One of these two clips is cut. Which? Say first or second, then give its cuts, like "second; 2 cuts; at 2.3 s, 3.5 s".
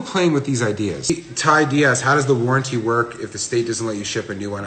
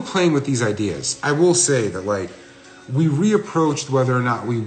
first; 1 cut; at 1.2 s